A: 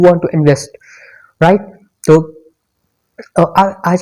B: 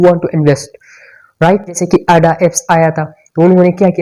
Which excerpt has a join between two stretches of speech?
B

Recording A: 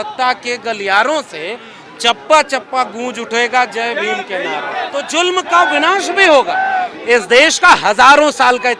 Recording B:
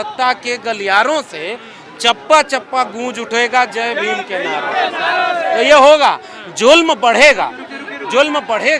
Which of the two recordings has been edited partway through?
A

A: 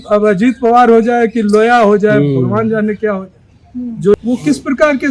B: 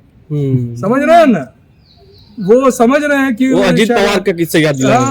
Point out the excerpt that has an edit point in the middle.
A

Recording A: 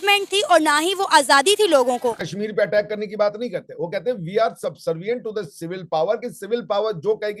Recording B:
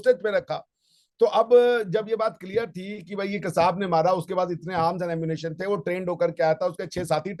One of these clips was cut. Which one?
A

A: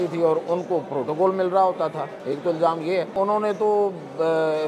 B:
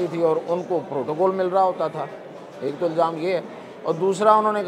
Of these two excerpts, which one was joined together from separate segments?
A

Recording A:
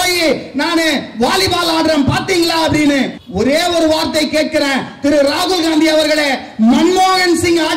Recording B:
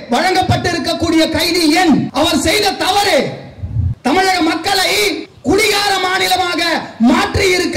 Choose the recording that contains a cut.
B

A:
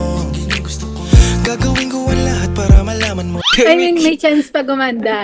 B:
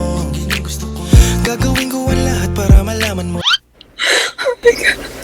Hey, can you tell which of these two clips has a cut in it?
B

